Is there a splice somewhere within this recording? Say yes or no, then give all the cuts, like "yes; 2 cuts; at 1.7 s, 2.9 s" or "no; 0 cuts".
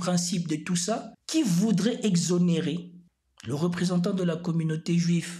yes; 1 cut; at 1.2 s